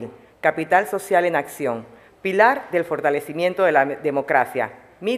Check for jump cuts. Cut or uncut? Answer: uncut